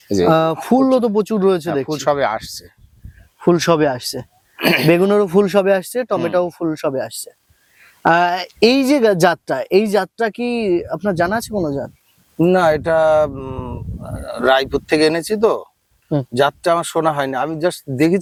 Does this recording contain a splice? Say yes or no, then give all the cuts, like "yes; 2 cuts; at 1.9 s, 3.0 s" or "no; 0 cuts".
no; 0 cuts